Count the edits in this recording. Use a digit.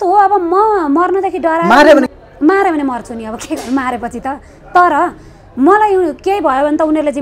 1